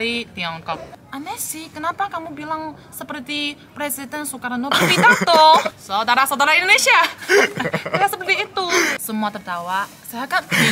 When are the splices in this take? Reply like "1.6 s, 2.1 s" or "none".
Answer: 1.0 s, 5.7 s, 7.1 s, 9.0 s